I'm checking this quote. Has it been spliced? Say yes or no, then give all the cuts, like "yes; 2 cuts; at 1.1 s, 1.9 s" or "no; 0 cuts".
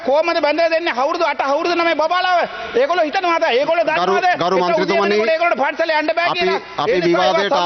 no; 0 cuts